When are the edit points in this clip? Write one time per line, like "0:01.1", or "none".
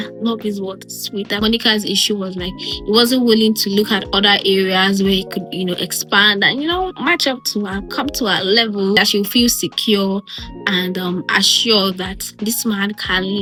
none